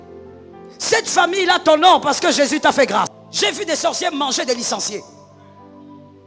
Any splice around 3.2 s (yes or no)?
yes